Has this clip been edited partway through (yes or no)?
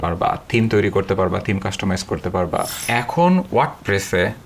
yes